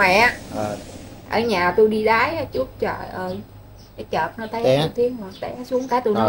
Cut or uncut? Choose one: uncut